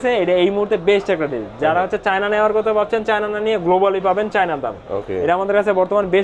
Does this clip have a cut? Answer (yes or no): no